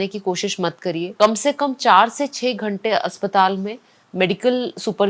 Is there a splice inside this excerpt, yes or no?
no